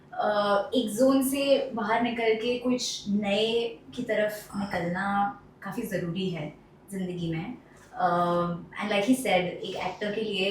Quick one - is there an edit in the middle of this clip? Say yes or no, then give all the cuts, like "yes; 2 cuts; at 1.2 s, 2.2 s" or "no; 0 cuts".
no; 0 cuts